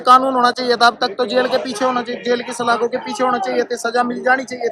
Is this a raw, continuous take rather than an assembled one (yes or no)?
yes